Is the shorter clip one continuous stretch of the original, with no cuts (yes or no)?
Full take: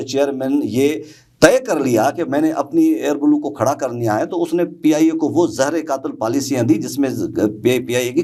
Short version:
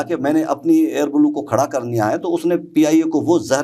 yes